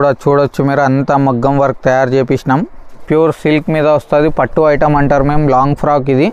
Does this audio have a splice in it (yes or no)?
yes